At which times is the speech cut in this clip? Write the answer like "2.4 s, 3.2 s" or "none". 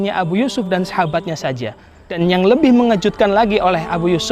2.2 s